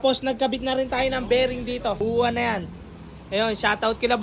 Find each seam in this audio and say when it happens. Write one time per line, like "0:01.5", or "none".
0:01.9